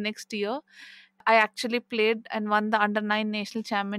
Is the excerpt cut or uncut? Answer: cut